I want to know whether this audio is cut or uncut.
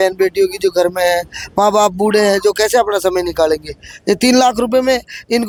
uncut